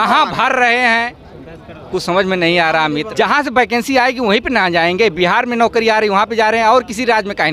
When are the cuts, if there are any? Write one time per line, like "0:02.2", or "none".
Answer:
0:03.1